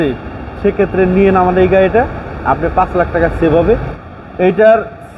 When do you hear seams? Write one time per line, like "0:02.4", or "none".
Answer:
0:03.9